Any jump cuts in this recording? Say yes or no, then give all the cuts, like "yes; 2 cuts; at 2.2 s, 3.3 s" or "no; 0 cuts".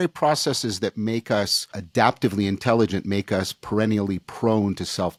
no; 0 cuts